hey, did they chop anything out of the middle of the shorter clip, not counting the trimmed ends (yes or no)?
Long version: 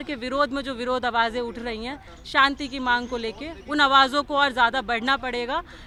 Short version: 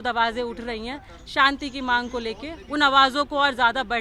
no